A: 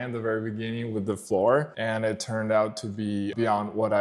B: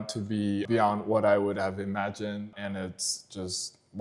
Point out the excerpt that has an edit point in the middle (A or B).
A